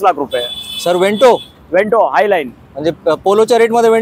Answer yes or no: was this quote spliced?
no